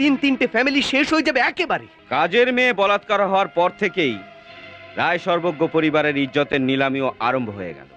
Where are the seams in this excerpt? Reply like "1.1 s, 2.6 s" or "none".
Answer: 1.9 s